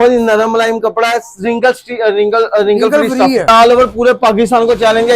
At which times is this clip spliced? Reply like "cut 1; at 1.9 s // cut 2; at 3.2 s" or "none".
cut 1; at 3.5 s